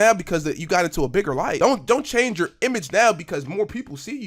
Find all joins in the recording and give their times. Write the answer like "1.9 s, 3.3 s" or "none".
1.6 s

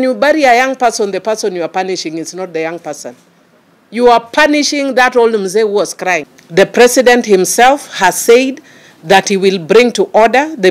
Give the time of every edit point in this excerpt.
6.3 s

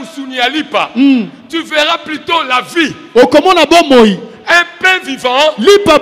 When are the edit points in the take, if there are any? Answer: none

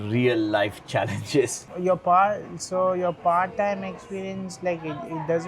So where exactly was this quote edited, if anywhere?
1.6 s

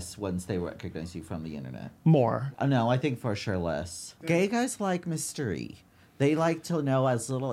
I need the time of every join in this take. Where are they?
2.5 s, 4.3 s

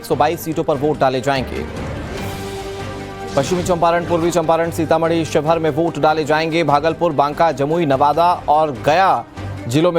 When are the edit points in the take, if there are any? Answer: 8.1 s

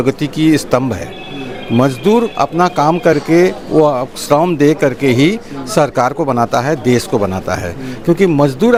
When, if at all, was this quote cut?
none

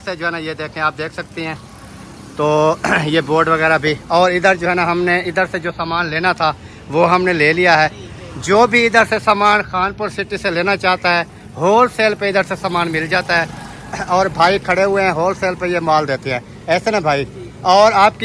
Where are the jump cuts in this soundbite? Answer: none

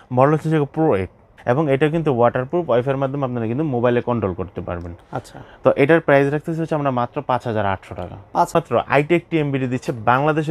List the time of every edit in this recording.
1.3 s, 8.5 s

